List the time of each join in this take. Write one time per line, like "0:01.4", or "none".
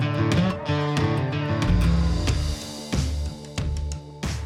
none